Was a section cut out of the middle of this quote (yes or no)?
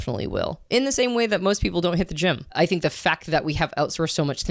yes